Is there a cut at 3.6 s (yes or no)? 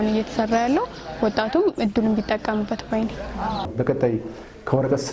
yes